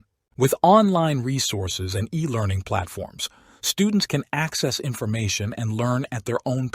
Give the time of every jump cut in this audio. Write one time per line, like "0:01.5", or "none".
0:02.6